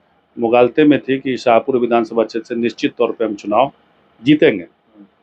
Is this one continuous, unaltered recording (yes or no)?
yes